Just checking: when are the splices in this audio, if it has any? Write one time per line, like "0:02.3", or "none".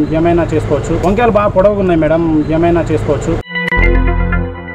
0:01.0
0:03.3

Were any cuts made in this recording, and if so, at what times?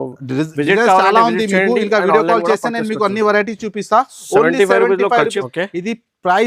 0:05.4

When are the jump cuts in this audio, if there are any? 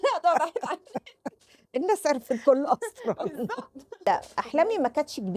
0:04.1

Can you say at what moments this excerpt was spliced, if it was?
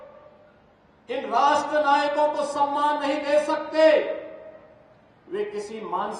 none

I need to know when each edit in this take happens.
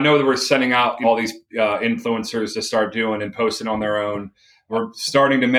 0:01.0
0:04.7

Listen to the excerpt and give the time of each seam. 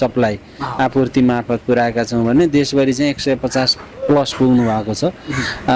none

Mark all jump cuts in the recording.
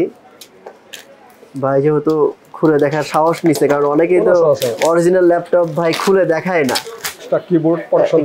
0:07.2

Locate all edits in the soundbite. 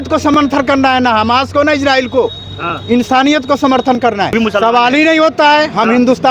0:04.4

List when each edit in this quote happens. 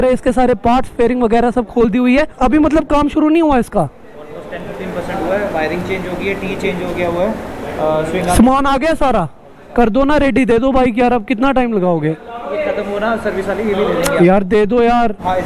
none

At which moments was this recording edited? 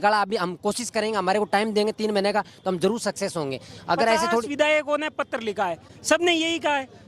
none

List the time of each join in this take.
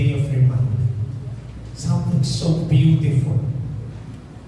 none

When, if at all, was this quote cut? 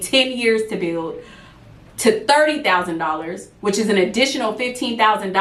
none

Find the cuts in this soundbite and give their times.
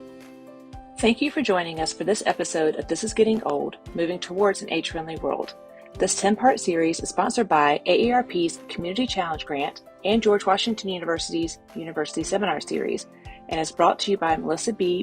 0:01.0

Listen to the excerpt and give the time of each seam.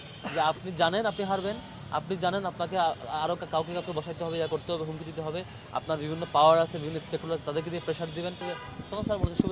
0:08.4

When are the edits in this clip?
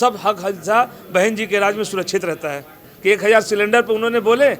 0:02.9

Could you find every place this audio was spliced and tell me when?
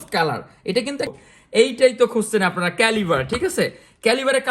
0:01.1

